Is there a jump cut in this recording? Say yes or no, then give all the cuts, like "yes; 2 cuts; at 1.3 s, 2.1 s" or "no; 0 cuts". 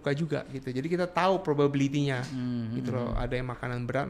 no; 0 cuts